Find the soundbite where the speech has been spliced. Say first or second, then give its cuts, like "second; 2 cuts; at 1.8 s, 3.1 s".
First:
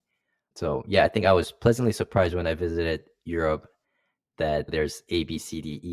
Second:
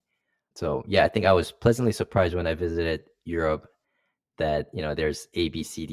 first; 1 cut; at 4.7 s